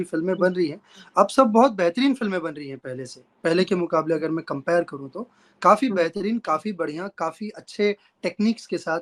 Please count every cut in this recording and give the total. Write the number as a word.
zero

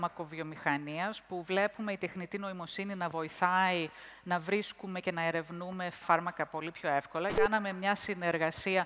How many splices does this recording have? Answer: two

